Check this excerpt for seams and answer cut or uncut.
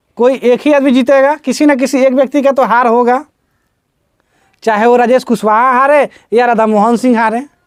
uncut